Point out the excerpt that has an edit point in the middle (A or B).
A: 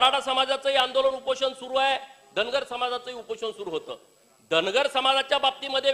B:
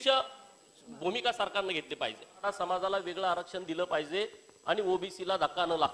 B